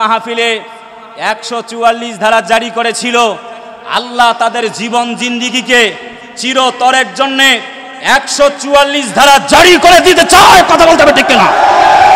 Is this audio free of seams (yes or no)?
yes